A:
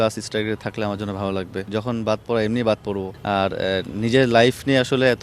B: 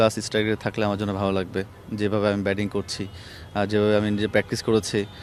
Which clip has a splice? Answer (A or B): A